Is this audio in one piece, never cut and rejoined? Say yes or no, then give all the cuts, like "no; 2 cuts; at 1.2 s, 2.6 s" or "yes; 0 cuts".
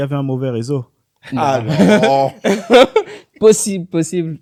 yes; 0 cuts